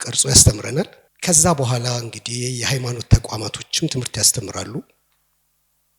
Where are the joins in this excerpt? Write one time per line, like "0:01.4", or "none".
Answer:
0:01.1